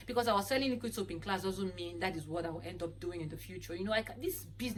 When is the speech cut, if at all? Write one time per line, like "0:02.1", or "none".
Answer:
none